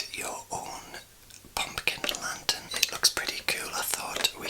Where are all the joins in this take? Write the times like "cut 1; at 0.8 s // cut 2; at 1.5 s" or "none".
cut 1; at 2.6 s